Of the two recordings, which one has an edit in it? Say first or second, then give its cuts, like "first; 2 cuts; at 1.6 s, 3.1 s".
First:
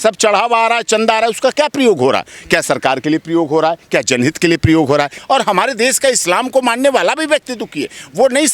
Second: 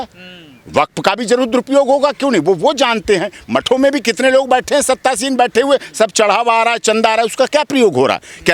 first; 1 cut; at 5.2 s